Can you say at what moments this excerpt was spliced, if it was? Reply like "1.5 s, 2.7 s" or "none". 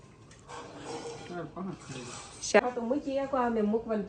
2.6 s